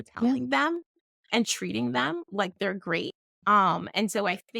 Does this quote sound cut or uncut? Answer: cut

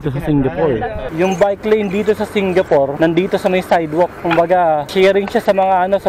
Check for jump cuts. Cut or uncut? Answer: cut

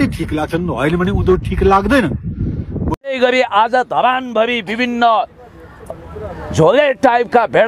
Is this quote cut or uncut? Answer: cut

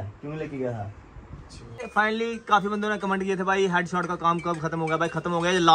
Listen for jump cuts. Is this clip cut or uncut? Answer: cut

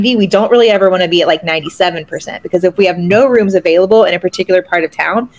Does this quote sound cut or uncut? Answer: uncut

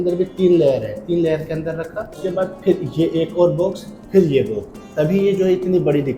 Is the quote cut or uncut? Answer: cut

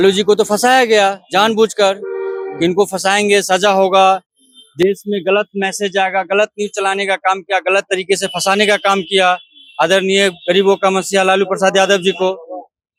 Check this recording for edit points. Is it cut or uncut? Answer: uncut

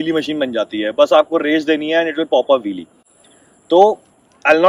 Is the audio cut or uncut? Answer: uncut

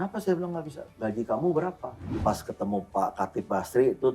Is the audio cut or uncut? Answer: cut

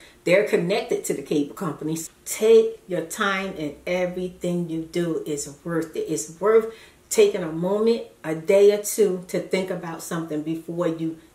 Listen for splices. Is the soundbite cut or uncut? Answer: cut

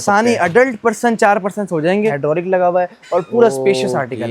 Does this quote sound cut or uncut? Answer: cut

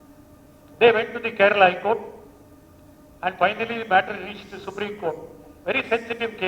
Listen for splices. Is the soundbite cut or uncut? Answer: uncut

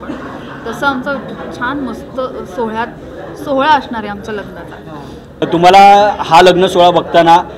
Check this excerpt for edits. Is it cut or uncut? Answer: cut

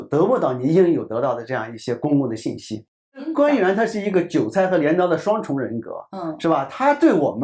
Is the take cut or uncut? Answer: cut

